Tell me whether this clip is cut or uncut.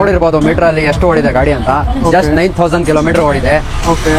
uncut